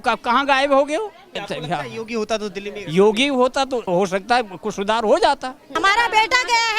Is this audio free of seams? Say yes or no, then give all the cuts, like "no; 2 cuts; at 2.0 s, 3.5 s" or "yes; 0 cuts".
no; 3 cuts; at 1.4 s, 3.8 s, 5.8 s